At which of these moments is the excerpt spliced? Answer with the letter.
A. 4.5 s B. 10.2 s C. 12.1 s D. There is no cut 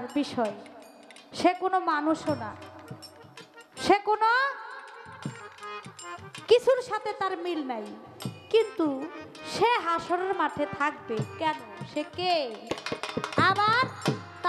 D